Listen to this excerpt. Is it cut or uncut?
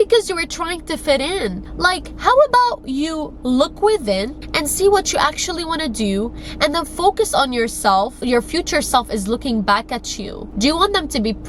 cut